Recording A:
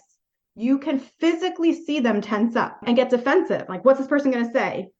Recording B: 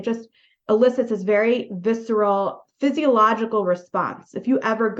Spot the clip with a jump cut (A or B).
A